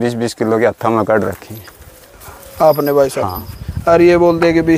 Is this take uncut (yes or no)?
yes